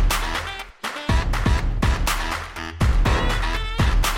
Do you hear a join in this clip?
no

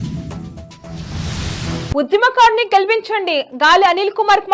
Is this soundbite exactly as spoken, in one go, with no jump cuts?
no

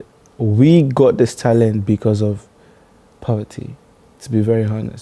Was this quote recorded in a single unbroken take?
yes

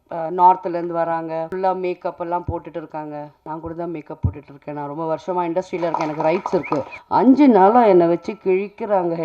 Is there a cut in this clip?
yes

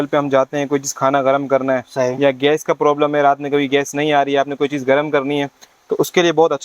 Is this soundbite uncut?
yes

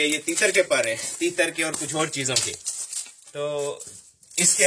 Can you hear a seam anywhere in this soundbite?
no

